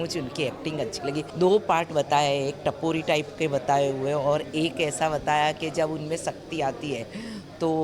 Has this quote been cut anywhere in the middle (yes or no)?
yes